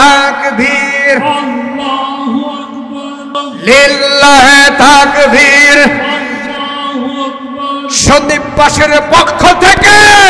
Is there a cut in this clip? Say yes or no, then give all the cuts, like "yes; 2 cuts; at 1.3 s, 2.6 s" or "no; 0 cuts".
yes; 1 cut; at 3.3 s